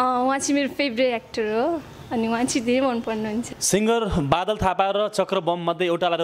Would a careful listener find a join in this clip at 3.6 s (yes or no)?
yes